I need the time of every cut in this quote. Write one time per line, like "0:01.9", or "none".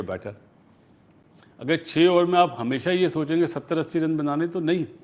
none